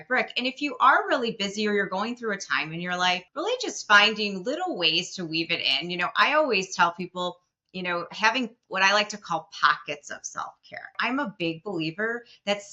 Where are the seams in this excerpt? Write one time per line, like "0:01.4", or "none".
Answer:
0:03.3
0:11.0